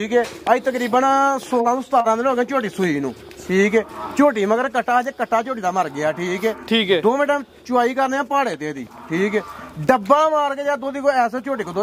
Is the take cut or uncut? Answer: uncut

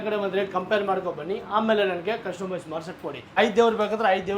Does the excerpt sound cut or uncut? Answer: cut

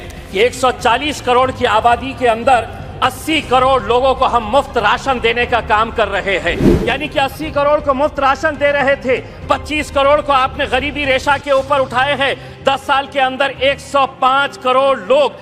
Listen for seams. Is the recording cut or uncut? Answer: cut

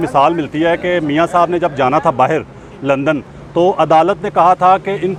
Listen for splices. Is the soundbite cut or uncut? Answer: uncut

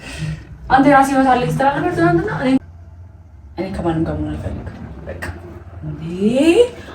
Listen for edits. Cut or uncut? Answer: cut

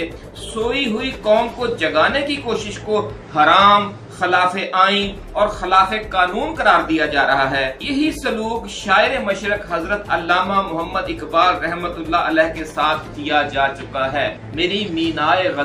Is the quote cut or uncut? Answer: cut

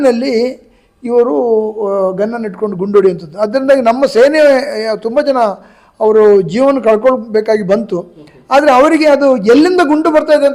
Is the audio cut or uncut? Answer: uncut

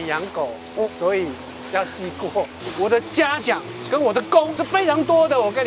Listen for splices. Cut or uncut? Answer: cut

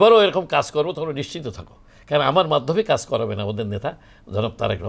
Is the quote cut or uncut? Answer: uncut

